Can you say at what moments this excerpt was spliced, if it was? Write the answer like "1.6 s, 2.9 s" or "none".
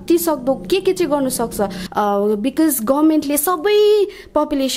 1.8 s